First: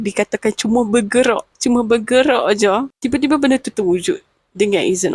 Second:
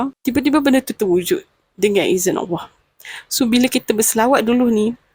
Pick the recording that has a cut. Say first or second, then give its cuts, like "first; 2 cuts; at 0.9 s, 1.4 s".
first; 1 cut; at 1.5 s